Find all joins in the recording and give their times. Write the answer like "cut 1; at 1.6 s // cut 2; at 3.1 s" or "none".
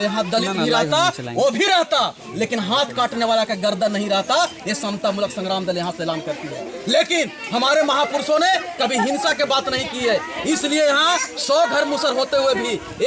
none